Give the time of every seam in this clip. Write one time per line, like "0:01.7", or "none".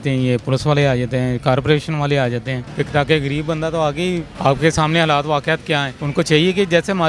0:02.6
0:04.3
0:06.0